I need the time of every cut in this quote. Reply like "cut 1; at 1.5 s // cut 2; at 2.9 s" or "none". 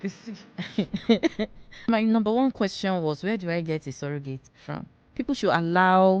cut 1; at 1.9 s // cut 2; at 4.5 s

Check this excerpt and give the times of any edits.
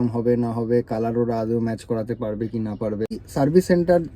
cut 1; at 3.2 s

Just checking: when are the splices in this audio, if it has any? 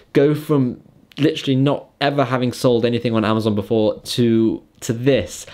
none

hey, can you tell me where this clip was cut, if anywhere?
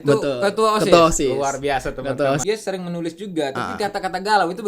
cut 1; at 2.4 s

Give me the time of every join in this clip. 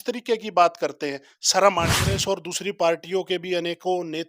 cut 1; at 2.1 s

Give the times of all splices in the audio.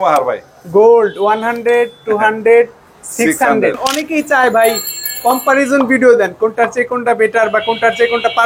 cut 1; at 3.9 s

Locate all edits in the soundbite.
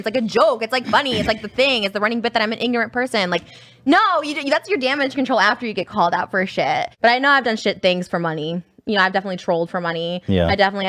cut 1; at 6.9 s

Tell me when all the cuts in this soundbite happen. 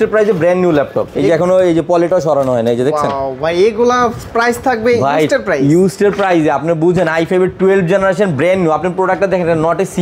cut 1; at 1.0 s

